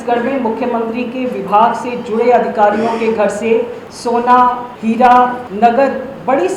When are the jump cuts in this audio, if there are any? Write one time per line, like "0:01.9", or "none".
0:03.8
0:04.7
0:05.4